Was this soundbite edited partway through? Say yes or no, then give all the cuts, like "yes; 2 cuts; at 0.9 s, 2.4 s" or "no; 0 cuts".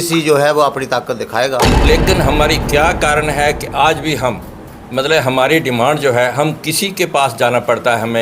yes; 1 cut; at 1.7 s